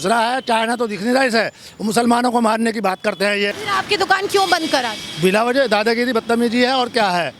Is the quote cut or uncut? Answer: cut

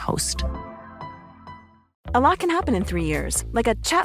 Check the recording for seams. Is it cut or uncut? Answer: cut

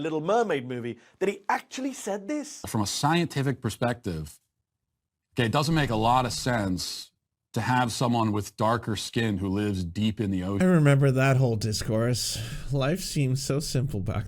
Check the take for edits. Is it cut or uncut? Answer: cut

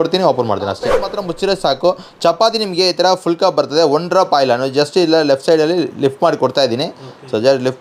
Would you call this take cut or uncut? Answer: cut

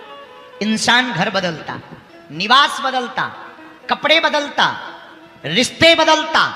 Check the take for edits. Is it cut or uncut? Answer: uncut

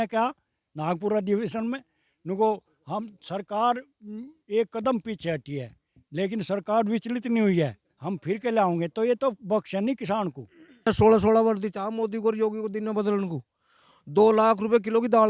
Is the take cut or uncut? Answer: cut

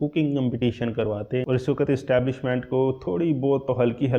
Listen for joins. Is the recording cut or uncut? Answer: cut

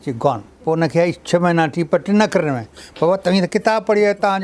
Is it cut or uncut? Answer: uncut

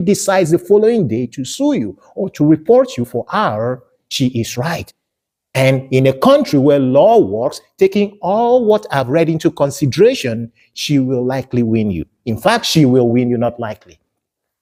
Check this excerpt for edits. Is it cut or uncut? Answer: uncut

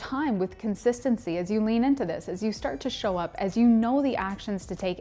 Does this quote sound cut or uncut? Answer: uncut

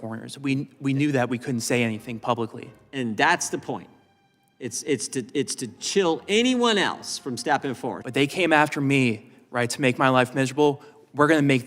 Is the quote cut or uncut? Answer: cut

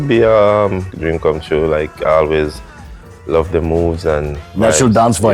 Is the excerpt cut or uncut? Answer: cut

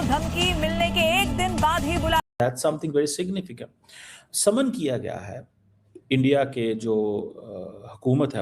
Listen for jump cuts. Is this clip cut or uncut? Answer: cut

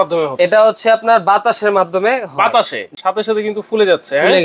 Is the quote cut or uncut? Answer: cut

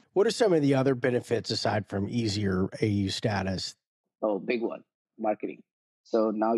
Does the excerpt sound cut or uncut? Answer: uncut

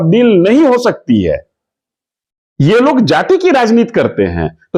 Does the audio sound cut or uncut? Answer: uncut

